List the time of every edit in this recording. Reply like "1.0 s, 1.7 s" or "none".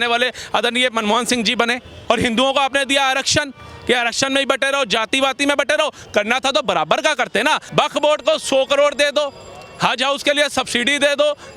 2.0 s, 7.6 s